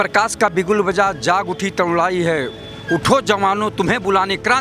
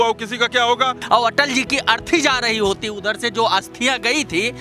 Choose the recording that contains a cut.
second; 1 cut; at 1.0 s

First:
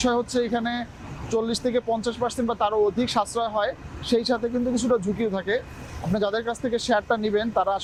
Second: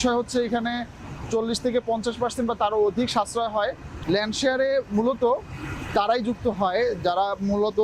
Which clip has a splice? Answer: second; 1 cut; at 3.9 s

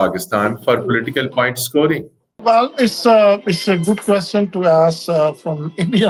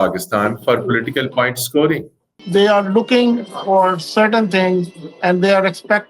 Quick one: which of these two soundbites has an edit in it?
second; 1 cut; at 2.3 s

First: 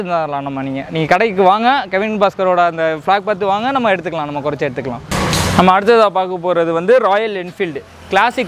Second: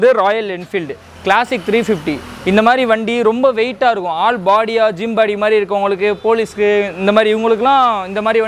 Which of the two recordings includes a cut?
first; 1 cut; at 5.0 s

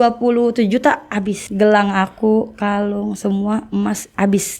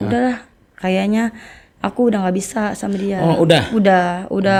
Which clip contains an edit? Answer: first; 1 cut; at 1.4 s

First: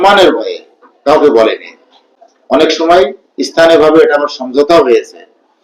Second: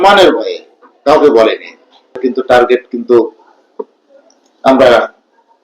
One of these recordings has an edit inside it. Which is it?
second; 1 cut; at 2.2 s

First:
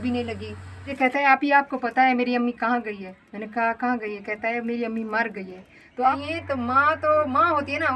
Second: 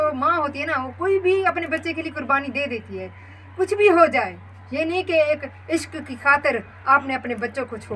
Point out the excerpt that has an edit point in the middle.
first; 2 cuts; at 0.9 s, 6.1 s

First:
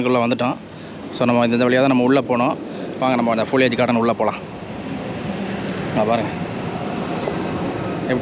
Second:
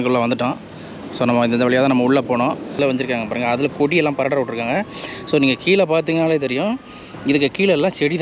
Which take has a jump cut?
second; 1 cut; at 2.8 s

